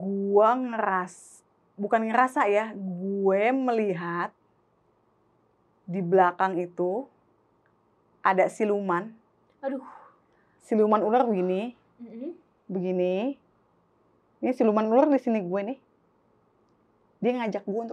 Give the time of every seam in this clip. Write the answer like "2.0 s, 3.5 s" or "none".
none